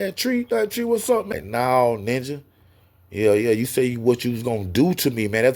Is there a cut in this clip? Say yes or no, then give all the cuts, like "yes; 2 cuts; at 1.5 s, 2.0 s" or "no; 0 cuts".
yes; 1 cut; at 1.3 s